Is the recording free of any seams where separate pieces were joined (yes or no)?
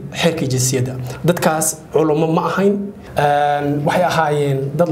no